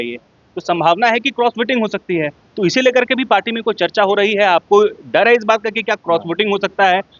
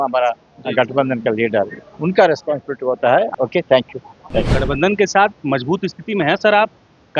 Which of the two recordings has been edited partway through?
second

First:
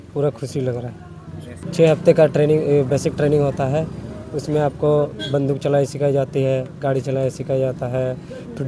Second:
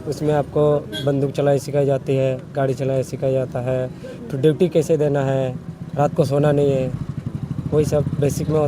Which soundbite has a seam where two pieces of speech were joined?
first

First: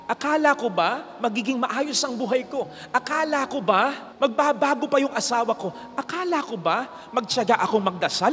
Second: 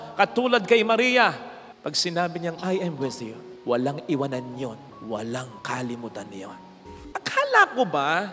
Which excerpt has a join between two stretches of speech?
second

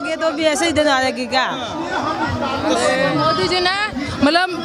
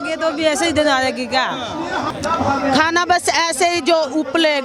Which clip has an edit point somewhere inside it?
second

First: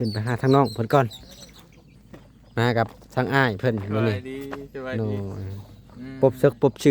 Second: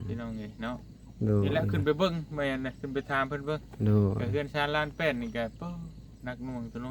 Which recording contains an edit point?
first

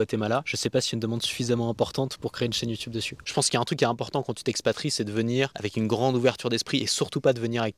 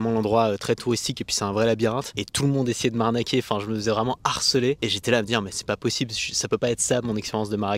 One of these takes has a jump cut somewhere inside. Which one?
first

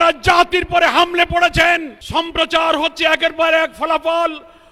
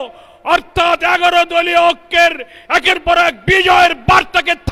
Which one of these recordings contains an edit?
first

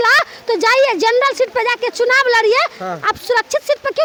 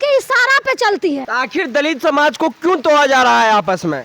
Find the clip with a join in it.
second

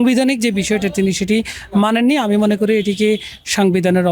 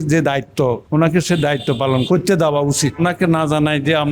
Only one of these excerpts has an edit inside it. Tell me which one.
second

